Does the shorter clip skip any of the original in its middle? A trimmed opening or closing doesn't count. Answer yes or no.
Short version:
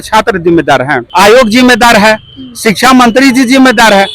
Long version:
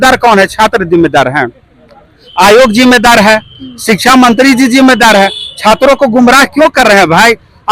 yes